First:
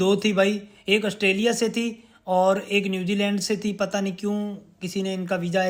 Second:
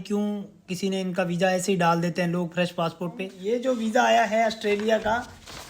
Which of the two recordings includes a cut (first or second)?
second